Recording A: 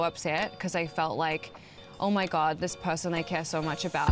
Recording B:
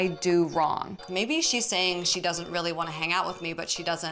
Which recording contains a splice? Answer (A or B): B